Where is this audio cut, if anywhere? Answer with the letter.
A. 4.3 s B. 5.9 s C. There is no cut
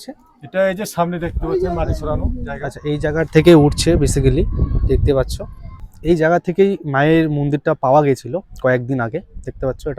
B